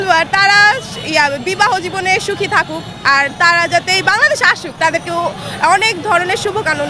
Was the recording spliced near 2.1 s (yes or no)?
no